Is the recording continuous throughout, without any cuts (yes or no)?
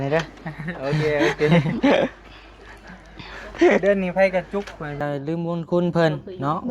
no